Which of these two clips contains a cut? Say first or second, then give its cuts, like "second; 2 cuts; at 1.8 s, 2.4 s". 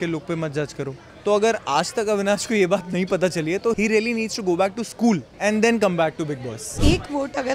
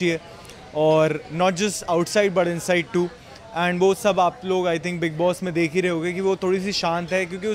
first; 4 cuts; at 1.0 s, 3.8 s, 5.3 s, 6.7 s